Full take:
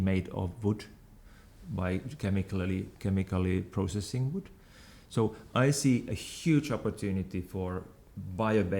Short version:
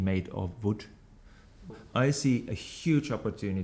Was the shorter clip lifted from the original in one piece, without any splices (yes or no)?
no